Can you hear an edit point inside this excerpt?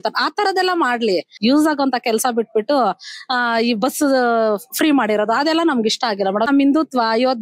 yes; 2 cuts; at 1.3 s, 6.5 s

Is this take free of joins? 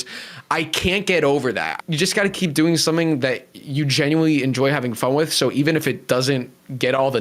no; 1 cut; at 1.7 s

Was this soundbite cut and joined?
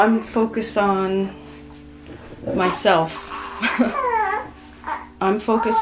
no; 0 cuts

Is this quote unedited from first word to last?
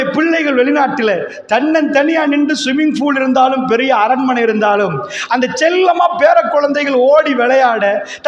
yes; 0 cuts

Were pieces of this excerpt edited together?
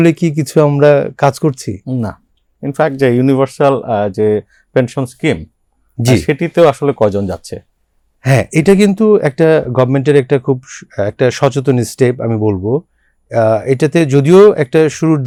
no; 0 cuts

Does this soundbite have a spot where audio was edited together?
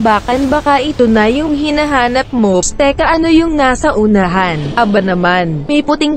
yes; 1 cut; at 2.6 s

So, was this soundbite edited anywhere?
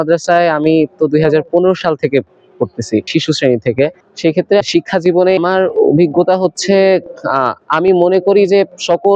no; 0 cuts

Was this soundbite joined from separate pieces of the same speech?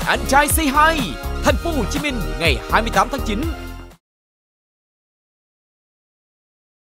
no; 0 cuts

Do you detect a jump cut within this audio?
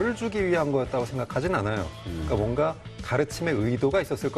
yes; 1 cut; at 1.9 s

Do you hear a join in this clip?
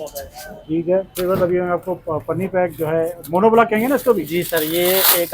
yes; 1 cut; at 1.1 s

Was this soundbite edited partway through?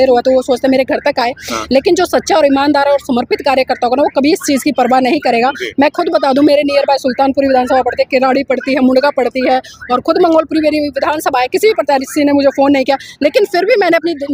no; 0 cuts

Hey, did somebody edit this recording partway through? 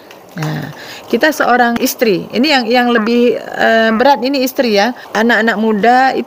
yes; 2 cuts; at 1.8 s, 5.0 s

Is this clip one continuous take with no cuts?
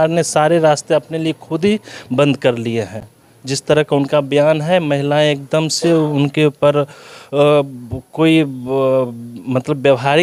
yes; 0 cuts

